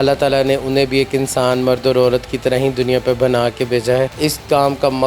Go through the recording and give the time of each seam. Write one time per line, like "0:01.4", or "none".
0:04.1